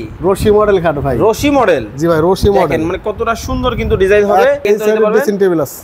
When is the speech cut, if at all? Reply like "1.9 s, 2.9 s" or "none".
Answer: 4.6 s